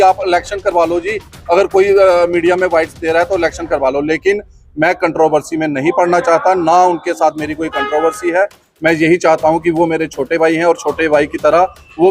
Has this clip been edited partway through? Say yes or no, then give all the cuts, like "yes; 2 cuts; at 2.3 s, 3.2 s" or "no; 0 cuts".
no; 0 cuts